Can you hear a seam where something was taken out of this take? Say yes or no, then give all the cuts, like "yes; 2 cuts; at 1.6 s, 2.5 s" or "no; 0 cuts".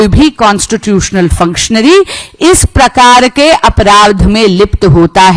no; 0 cuts